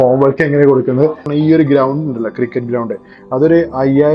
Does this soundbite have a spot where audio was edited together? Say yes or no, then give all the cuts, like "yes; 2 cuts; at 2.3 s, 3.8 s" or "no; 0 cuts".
yes; 1 cut; at 1.3 s